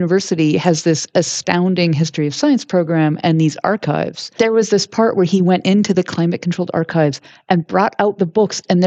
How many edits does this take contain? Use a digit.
1